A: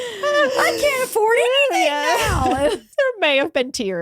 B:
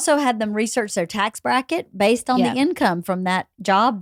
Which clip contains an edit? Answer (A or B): A